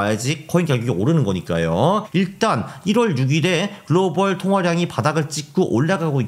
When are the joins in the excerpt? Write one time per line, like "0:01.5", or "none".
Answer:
0:02.1